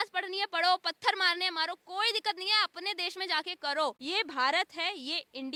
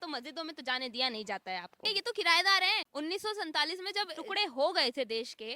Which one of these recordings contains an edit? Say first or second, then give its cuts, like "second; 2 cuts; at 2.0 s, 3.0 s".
second; 2 cuts; at 1.8 s, 4.2 s